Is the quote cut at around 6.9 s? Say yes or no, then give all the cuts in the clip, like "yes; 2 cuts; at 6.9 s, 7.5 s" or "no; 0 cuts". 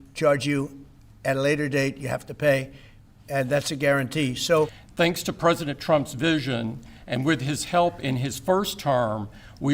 no; 1 cut; at 4.8 s